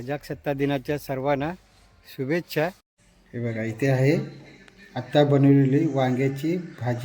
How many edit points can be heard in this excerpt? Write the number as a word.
one